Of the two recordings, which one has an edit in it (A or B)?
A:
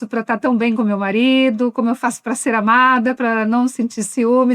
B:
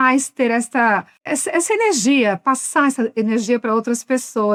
A